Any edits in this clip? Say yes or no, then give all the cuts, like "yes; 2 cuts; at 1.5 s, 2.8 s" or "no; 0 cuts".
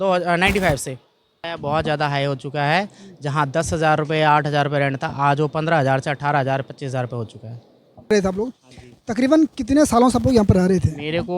yes; 2 cuts; at 1.5 s, 8.1 s